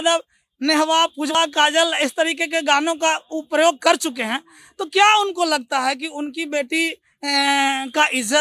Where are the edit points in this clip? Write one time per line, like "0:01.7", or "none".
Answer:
0:01.3

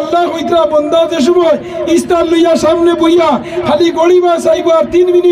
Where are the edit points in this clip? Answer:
none

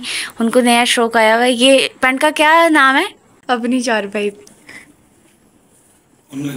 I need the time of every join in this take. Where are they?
0:03.3

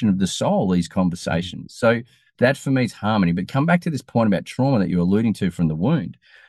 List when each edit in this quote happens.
0:02.2

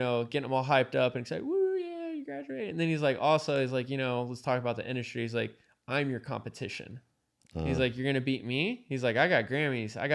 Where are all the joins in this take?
none

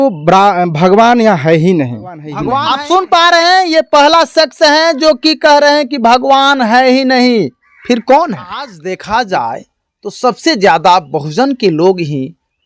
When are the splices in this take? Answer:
0:02.4
0:08.8

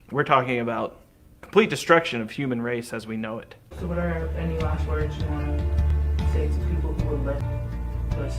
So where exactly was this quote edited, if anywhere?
0:03.6
0:07.4

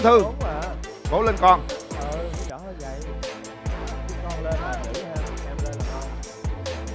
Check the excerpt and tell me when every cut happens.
none

